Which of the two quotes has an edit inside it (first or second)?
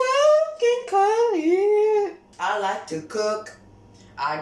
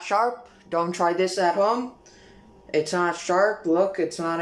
first